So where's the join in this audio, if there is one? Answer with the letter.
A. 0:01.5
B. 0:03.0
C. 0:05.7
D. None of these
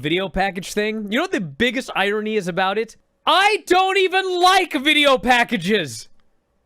B